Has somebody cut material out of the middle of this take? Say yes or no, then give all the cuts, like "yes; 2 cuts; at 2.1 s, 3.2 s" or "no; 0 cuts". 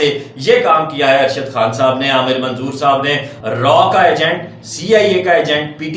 yes; 1 cut; at 3.3 s